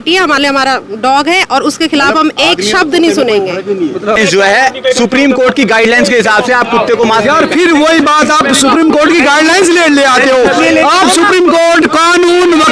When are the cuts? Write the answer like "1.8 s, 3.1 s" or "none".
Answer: 4.2 s